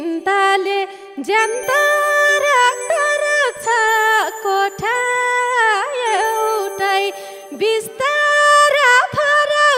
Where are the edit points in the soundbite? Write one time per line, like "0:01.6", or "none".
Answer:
none